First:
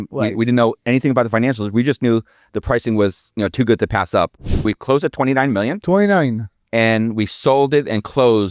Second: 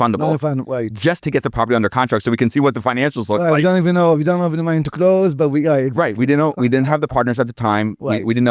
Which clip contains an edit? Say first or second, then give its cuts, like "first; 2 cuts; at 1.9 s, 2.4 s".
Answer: first; 1 cut; at 4.6 s